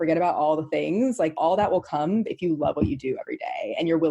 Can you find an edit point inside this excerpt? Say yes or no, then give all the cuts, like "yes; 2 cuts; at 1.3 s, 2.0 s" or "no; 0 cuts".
yes; 1 cut; at 1.4 s